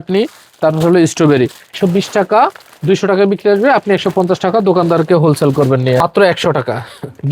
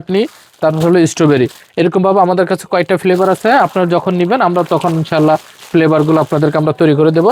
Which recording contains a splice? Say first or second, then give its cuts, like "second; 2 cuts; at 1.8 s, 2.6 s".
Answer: first; 2 cuts; at 1.7 s, 6.0 s